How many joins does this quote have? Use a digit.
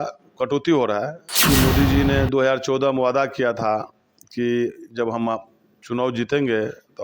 1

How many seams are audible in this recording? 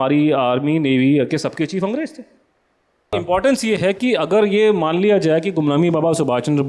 1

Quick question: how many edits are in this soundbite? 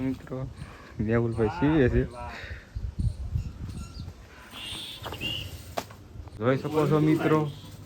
0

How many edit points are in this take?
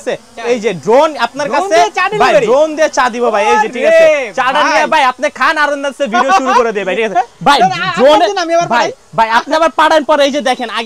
0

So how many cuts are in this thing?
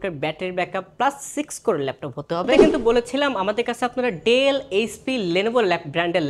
1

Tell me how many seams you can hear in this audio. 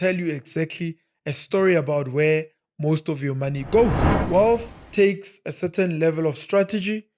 1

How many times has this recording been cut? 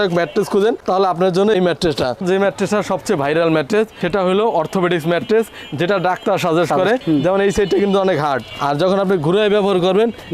2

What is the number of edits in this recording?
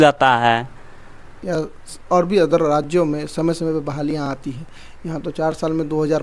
1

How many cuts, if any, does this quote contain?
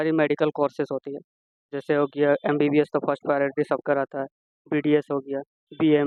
0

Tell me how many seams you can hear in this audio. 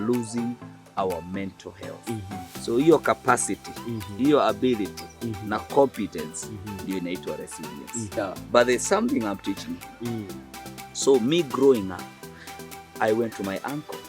1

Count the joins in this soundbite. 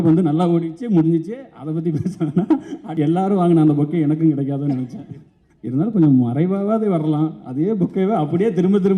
1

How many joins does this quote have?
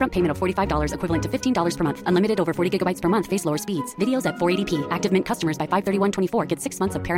0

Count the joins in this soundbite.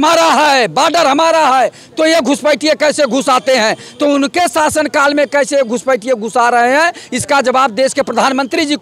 0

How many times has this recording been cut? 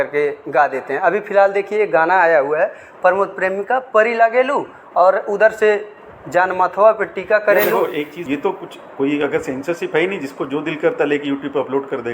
1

